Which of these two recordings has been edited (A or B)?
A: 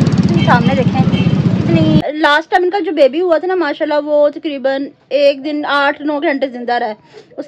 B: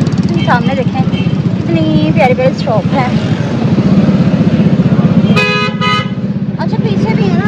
A